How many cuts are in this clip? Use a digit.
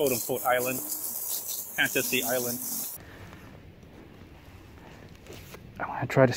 1